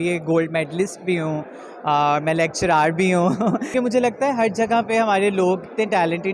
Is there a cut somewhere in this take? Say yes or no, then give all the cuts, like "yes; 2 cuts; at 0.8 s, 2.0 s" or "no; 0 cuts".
yes; 1 cut; at 3.7 s